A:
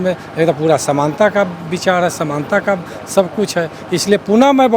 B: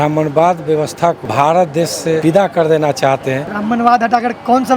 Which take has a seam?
B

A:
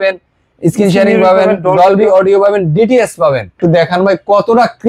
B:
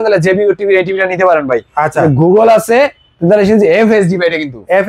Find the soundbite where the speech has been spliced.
A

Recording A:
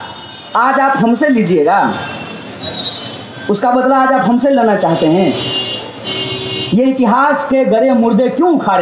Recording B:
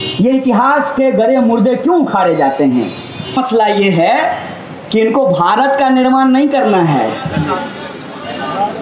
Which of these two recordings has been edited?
B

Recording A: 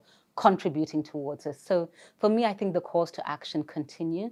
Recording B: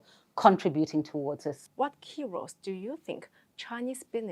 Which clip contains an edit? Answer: B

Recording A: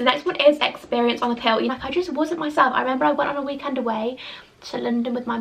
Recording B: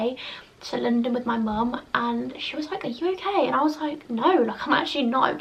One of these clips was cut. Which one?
A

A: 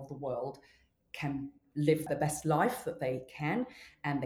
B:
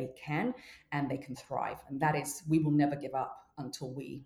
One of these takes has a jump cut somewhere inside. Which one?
A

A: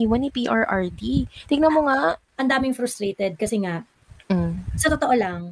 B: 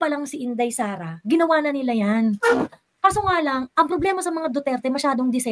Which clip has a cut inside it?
A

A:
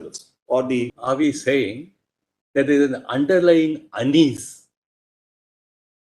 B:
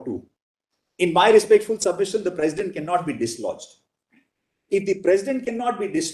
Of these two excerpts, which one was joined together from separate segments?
A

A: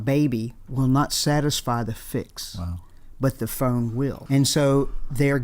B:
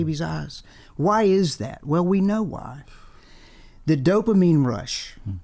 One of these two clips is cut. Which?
A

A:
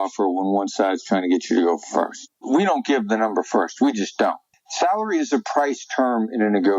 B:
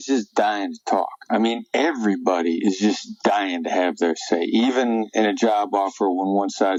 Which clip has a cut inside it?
A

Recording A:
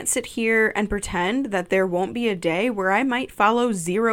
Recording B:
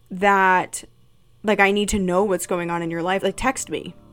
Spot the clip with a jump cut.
B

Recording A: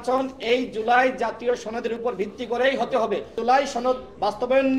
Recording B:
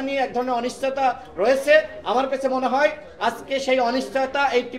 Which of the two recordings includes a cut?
A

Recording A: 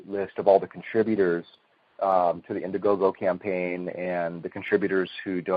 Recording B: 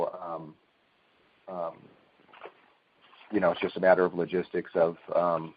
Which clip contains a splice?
A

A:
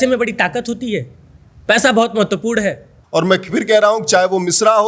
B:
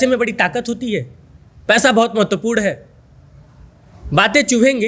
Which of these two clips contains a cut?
A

